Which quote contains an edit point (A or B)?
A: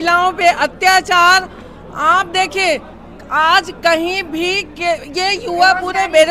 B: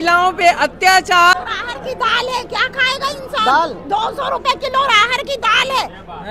B